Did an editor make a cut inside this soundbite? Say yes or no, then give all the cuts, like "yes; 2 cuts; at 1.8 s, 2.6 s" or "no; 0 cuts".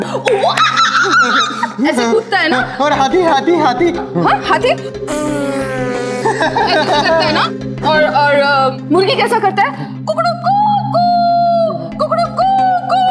no; 0 cuts